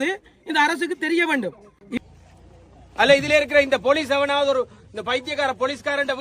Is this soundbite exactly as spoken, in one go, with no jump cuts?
no; 1 cut; at 2.0 s

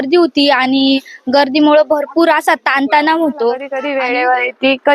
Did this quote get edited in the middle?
yes; 1 cut; at 3.8 s

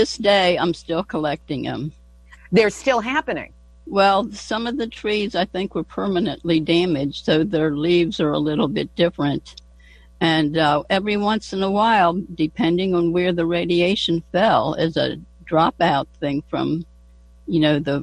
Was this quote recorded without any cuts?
yes; 0 cuts

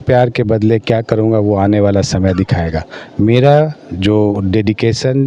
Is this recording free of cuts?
yes; 0 cuts

